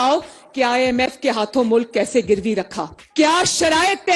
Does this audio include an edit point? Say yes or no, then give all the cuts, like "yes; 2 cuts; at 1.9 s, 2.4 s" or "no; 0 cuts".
no; 0 cuts